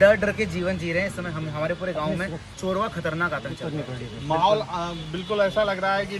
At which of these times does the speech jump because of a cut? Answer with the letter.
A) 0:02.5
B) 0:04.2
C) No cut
C